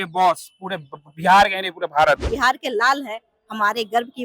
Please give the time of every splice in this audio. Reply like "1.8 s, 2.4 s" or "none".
2.3 s